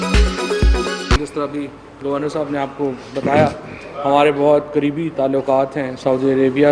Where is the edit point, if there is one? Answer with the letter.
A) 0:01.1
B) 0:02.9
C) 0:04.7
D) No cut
A